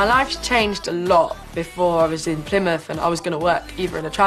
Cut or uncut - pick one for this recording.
uncut